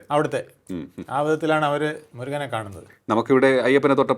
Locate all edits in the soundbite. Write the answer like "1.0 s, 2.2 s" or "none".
none